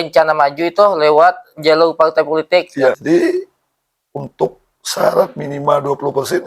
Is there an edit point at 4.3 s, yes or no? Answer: no